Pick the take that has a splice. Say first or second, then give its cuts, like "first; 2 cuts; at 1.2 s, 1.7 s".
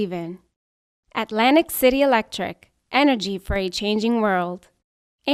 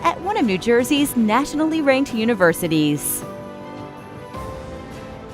second; 1 cut; at 3.0 s